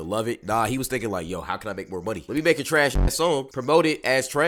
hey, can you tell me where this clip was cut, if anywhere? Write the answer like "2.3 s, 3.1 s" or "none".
none